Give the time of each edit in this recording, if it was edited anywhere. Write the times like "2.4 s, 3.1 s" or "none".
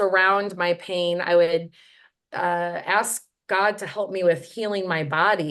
none